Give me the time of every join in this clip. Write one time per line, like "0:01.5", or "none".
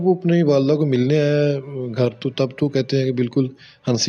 none